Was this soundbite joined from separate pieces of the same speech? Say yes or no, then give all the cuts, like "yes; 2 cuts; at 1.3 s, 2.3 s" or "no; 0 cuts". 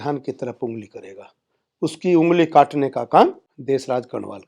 yes; 1 cut; at 3.5 s